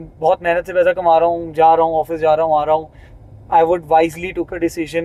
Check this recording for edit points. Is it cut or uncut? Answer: uncut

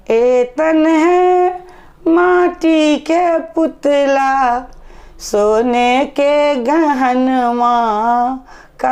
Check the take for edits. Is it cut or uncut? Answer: uncut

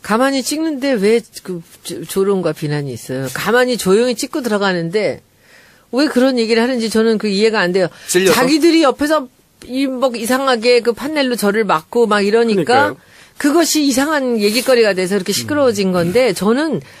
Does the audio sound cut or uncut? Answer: cut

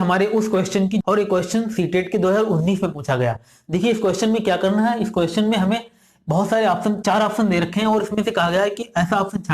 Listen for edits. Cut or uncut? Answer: cut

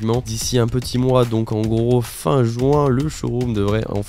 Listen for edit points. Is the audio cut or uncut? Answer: uncut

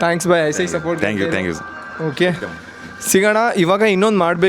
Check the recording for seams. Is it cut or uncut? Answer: uncut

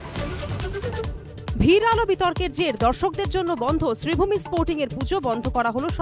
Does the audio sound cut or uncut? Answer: uncut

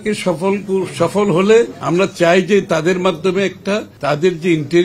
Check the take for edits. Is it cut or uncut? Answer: cut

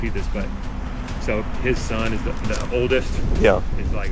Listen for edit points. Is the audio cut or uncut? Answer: uncut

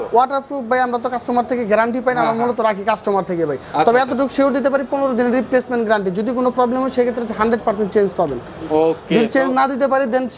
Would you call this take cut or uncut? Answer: uncut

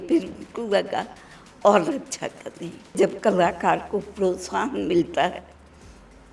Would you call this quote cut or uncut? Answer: cut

